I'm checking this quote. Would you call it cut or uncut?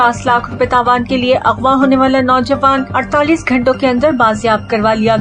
uncut